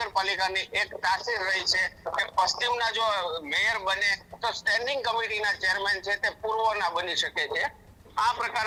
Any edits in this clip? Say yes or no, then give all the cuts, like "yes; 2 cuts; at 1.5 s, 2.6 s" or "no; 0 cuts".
no; 0 cuts